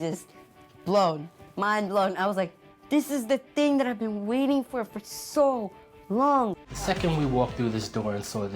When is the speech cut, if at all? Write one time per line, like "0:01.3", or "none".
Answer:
0:06.6